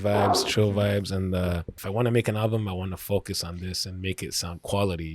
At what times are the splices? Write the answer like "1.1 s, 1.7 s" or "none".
1.8 s